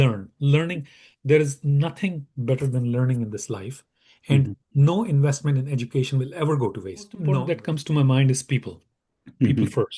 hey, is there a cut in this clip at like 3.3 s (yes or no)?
no